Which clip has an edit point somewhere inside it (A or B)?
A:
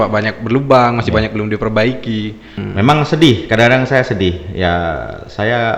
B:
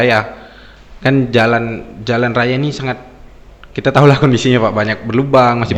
A